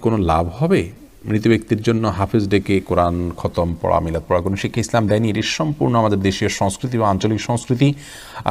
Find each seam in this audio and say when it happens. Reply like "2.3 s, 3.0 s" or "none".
none